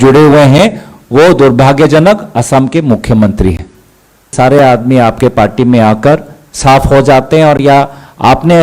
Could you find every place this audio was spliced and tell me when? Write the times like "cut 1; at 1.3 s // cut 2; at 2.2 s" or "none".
cut 1; at 4.3 s